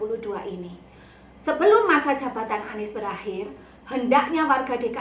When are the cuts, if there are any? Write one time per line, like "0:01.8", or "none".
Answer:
0:01.2